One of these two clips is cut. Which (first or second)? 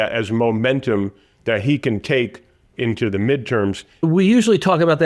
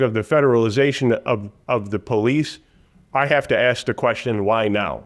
first